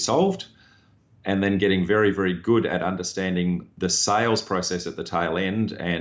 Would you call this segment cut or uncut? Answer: cut